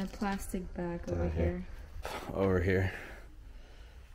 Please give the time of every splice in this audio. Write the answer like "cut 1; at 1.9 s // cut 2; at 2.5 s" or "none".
cut 1; at 2.0 s